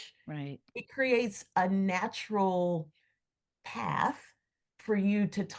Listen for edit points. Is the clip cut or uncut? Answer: uncut